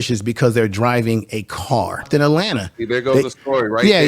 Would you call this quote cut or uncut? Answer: cut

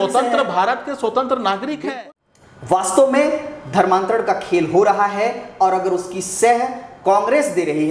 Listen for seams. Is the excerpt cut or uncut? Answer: cut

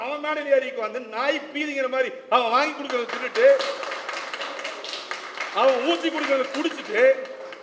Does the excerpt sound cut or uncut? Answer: uncut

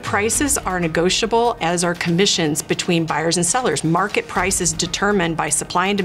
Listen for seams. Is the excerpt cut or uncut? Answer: uncut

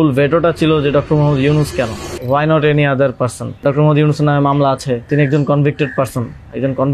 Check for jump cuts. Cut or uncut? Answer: cut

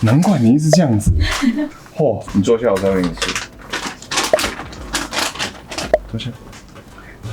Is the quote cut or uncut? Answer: cut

